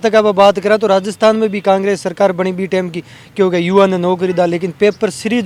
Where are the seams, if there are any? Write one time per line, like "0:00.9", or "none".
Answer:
none